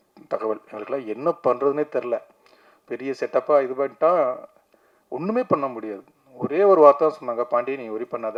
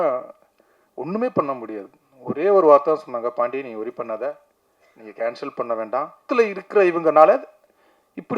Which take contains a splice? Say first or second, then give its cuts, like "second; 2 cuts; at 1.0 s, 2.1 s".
second; 1 cut; at 6.3 s